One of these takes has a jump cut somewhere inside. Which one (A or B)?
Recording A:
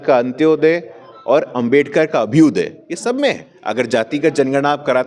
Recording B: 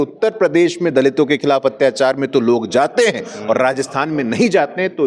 A